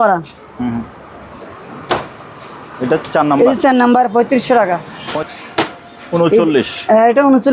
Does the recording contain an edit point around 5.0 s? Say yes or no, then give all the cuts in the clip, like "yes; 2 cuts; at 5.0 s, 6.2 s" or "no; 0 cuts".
yes; 1 cut; at 5.0 s